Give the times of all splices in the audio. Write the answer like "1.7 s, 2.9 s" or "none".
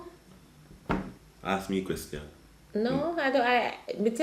1.2 s

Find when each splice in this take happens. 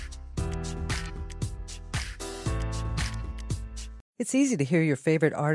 4.0 s

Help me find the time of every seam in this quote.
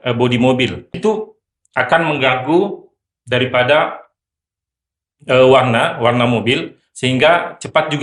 0.9 s

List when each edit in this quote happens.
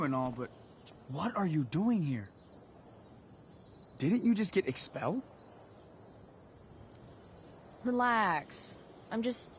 none

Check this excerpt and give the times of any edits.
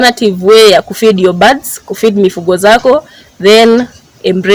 none

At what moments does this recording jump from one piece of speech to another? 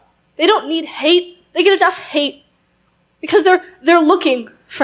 none

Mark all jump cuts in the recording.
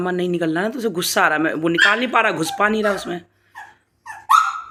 none

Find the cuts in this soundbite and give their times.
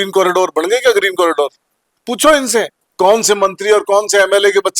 2.8 s

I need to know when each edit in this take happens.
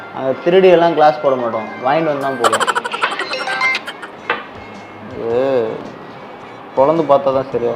4.1 s

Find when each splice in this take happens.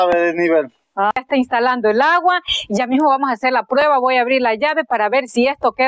1.1 s

